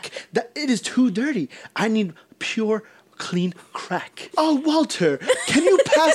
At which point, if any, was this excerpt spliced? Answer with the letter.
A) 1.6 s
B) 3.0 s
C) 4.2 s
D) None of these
C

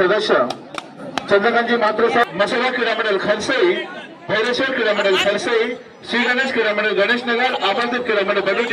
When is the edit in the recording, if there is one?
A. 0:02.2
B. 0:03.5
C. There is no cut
A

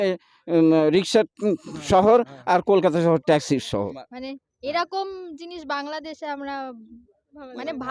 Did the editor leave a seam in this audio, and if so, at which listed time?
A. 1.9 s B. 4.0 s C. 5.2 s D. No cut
B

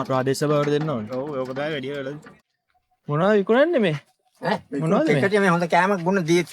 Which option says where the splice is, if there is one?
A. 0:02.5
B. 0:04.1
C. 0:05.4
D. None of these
A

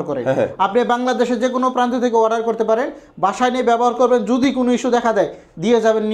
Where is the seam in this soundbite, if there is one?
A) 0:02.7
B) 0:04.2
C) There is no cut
C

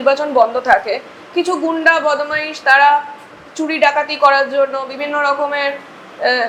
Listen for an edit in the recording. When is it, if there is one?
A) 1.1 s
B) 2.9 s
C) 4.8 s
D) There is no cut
D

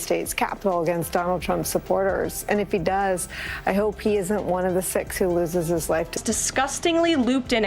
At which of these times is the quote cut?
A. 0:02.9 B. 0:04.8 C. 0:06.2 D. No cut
C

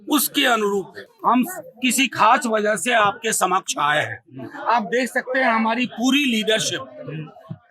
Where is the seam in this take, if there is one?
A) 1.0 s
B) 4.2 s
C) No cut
A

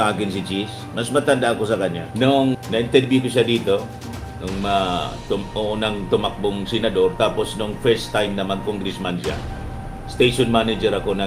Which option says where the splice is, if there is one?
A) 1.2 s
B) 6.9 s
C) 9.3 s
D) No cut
D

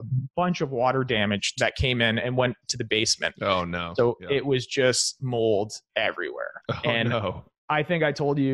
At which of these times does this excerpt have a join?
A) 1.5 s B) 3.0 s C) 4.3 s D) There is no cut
A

